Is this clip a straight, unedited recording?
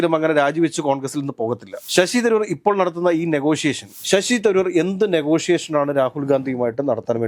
no; 1 cut; at 3.9 s

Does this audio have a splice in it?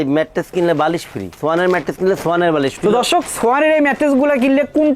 yes; 2 cuts; at 1.3 s, 2.7 s

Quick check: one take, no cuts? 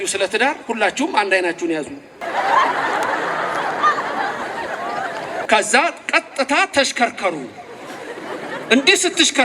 no; 2 cuts; at 2.2 s, 5.5 s

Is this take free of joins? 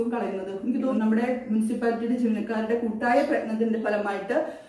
no; 1 cut; at 0.9 s

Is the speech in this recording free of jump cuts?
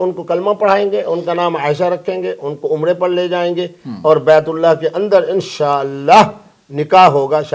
yes; 0 cuts

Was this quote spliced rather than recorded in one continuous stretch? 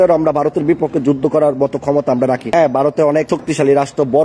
yes; 2 cuts; at 2.4 s, 3.3 s

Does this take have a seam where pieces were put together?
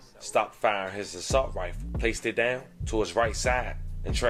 no; 0 cuts

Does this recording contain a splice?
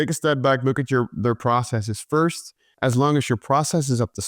yes; 1 cut; at 2.7 s

